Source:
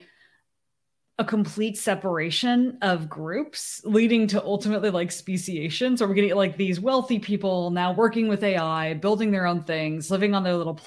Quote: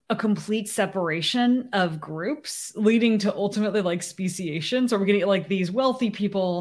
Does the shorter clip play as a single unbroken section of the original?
yes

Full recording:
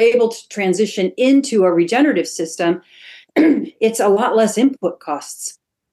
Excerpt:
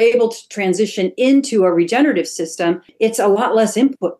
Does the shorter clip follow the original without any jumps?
no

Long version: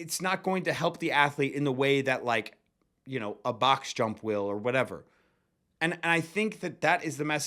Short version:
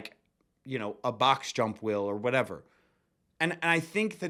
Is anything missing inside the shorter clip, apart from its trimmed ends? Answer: no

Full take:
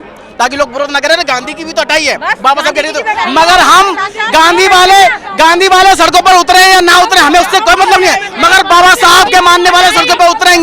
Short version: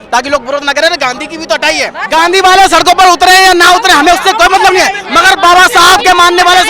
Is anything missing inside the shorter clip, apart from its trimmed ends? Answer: yes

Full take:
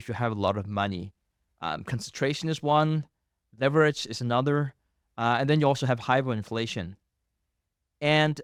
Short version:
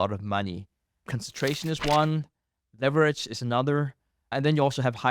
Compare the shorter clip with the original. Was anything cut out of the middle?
yes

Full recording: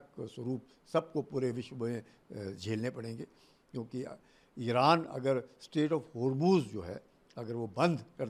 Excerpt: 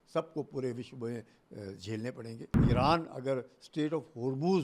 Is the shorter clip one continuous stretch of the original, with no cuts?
no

